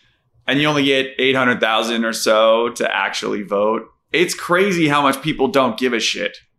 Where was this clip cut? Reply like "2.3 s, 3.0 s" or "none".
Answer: none